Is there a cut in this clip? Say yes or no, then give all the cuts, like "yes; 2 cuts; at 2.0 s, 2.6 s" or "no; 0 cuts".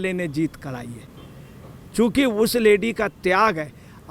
no; 0 cuts